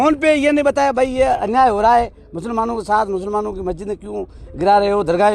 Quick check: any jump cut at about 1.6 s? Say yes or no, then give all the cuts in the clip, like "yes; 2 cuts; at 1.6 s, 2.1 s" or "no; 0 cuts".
no; 0 cuts